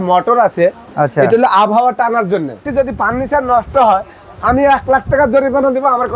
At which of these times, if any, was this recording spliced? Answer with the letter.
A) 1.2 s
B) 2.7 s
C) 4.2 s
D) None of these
B